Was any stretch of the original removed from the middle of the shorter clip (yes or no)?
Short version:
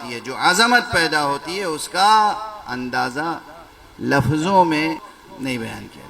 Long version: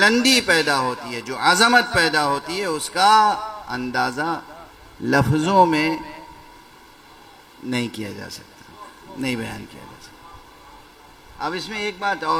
yes